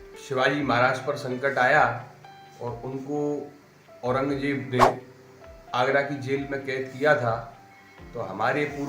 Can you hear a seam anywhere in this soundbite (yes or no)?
no